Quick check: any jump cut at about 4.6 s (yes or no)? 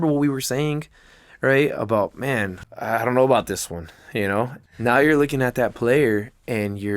yes